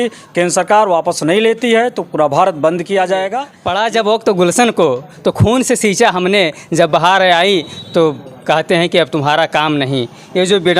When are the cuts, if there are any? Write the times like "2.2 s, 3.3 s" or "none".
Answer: 3.5 s